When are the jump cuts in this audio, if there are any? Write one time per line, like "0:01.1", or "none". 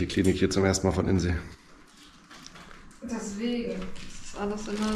none